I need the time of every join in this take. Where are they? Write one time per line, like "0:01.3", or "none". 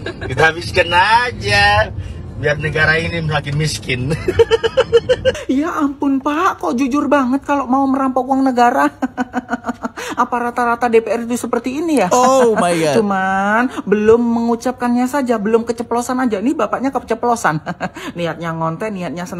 none